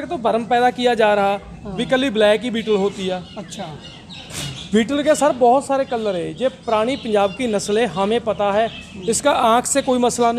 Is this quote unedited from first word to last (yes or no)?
yes